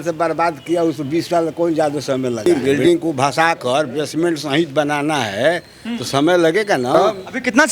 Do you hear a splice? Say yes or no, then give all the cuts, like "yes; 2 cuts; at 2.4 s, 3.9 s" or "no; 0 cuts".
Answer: yes; 2 cuts; at 2.5 s, 7.0 s